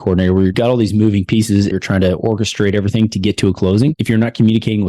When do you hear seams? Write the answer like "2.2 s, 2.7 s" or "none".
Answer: 1.7 s, 4.0 s